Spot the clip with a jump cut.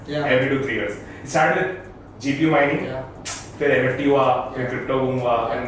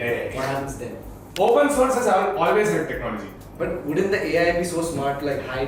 second; 2 cuts; at 1.2 s, 3.3 s

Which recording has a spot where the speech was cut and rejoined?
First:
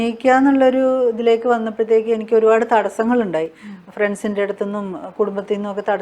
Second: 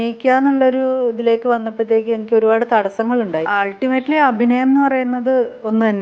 second; 1 cut; at 3.5 s

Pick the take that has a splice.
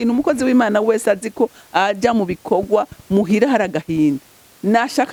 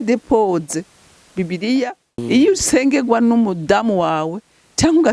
second; 1 cut; at 2.1 s

